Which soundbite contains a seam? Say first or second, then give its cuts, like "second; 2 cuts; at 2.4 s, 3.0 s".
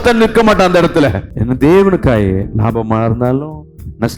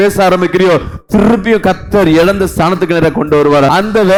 first; 1 cut; at 1.3 s